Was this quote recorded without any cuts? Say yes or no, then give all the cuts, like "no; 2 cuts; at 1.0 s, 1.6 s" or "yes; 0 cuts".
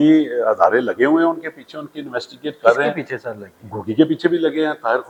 yes; 0 cuts